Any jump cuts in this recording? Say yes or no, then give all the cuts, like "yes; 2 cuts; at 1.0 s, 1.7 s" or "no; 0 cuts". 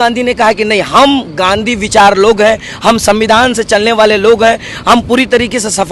no; 0 cuts